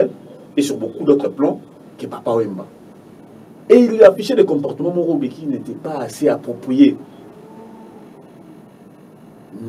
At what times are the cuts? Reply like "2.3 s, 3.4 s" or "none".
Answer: none